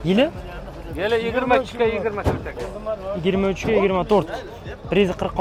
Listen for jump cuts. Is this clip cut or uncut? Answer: uncut